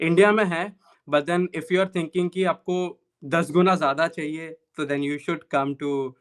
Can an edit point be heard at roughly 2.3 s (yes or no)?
no